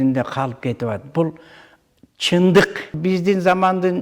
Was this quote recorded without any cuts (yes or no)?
no